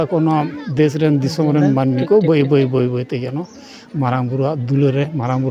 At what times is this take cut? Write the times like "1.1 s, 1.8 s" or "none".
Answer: none